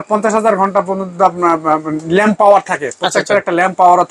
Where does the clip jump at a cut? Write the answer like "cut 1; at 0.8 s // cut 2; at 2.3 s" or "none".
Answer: none